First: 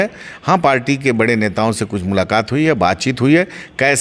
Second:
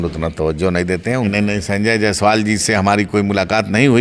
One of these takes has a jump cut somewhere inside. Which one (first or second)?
second